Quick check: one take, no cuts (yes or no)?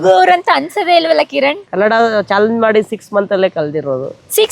no